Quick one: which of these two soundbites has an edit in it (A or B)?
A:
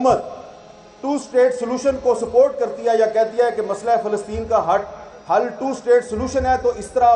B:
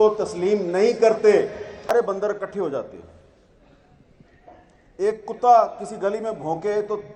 B